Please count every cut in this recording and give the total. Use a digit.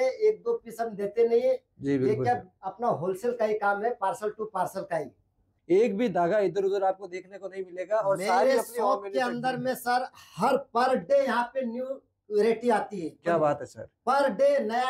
1